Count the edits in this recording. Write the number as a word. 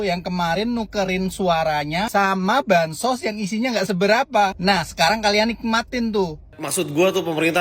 one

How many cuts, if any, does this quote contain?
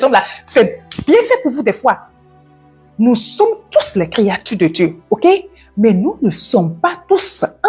one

